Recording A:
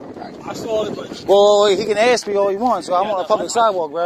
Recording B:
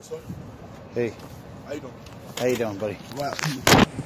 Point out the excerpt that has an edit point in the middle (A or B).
A